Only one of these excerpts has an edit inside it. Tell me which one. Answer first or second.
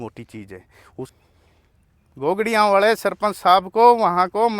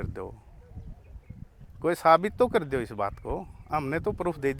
first